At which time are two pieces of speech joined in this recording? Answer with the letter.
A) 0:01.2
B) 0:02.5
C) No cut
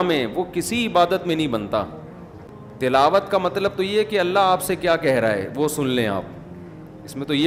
C